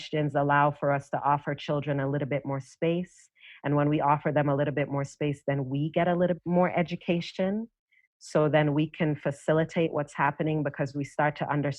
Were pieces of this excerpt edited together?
yes; 1 cut; at 6.3 s

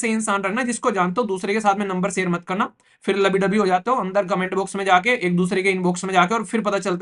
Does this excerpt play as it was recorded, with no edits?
yes; 0 cuts

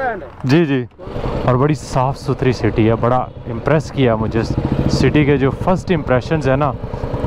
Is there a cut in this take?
yes; 1 cut; at 1.1 s

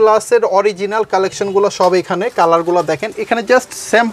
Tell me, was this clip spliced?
no; 0 cuts

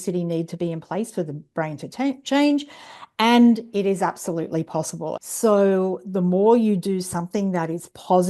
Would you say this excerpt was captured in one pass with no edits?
no; 1 cut; at 5.2 s

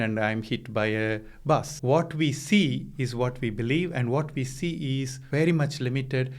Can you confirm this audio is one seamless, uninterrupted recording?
no; 2 cuts; at 1.7 s, 5.2 s

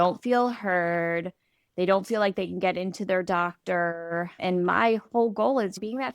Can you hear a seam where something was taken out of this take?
yes; 1 cut; at 4.3 s

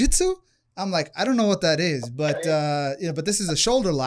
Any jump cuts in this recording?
no; 0 cuts

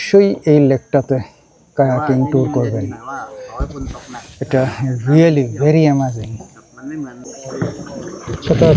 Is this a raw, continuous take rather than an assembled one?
no; 1 cut; at 7.3 s

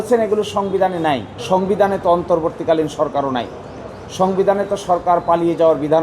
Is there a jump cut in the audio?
yes; 1 cut; at 1.3 s

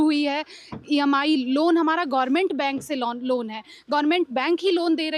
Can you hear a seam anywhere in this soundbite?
no; 0 cuts

